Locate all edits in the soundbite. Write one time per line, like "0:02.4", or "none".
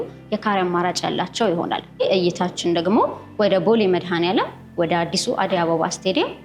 0:02.0

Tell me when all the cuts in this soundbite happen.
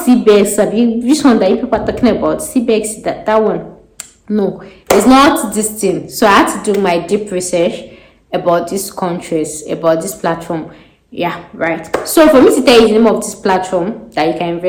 none

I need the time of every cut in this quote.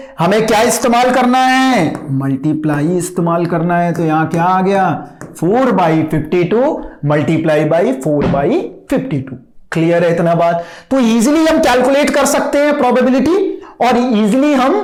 none

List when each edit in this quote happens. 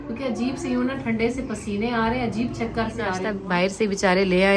0:03.3

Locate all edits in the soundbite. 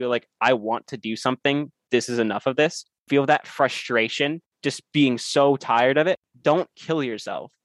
0:03.0
0:04.5
0:06.3

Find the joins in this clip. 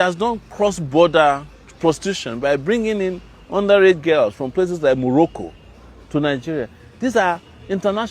none

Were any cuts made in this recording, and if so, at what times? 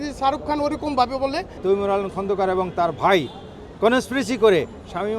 0:01.5

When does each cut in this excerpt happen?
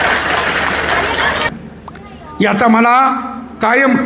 0:01.5

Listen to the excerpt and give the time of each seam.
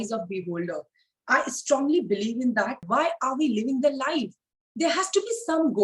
0:02.8

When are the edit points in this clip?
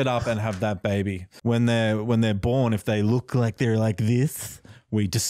0:01.2

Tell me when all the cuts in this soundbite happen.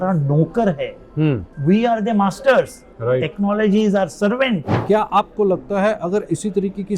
0:04.7

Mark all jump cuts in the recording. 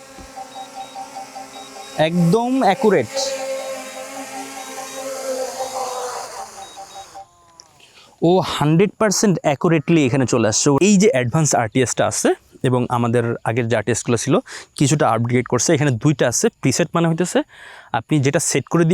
0:10.8

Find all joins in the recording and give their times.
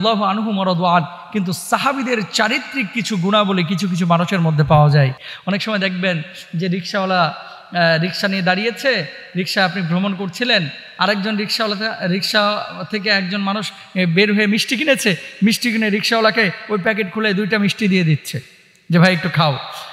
none

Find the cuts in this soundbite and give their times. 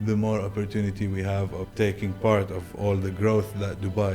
0:01.7

